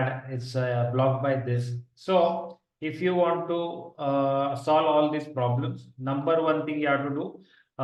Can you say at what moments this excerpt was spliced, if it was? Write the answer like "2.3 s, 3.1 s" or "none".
none